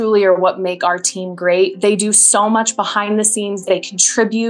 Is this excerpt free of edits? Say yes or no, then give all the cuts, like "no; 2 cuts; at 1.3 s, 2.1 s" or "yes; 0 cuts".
no; 1 cut; at 3.6 s